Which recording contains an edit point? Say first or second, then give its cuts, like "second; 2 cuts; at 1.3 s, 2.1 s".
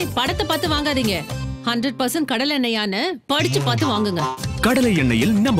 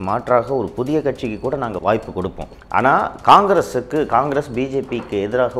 second; 1 cut; at 1.8 s